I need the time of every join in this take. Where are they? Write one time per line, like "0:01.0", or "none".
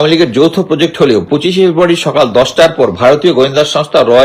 0:01.3